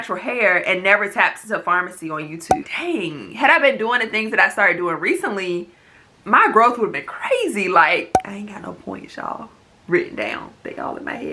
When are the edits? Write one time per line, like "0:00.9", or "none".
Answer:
0:02.7
0:08.2